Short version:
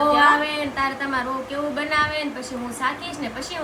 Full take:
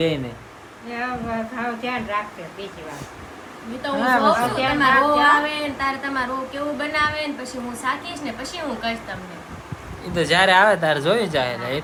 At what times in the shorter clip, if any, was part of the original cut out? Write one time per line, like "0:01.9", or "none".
none